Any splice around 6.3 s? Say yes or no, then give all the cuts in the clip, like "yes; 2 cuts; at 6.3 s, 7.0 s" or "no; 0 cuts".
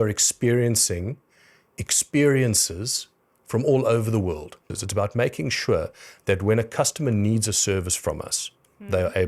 no; 1 cut; at 4.6 s